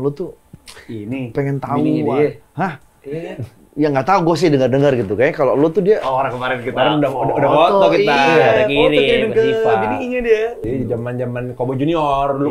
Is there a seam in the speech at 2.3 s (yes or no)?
no